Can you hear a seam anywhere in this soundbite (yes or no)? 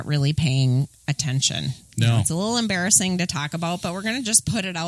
no